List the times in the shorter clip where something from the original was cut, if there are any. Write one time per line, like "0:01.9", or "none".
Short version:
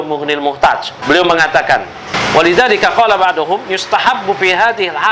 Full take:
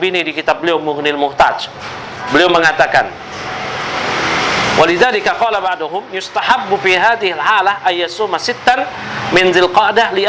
0:00.9
0:02.2